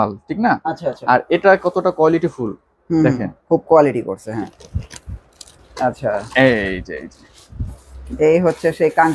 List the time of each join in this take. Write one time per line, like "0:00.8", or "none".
0:04.5